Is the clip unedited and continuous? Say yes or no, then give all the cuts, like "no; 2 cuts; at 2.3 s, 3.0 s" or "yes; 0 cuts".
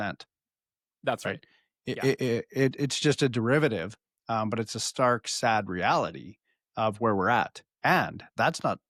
yes; 0 cuts